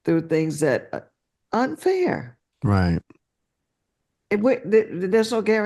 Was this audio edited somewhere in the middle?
no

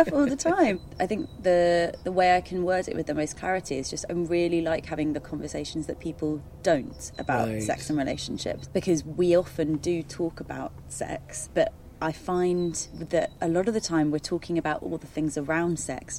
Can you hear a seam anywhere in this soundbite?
yes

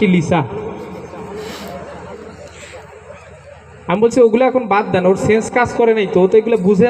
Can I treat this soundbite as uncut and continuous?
yes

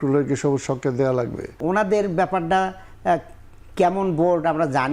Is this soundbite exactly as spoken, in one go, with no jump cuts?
no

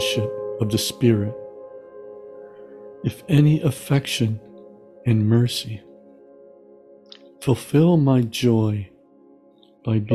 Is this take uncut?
no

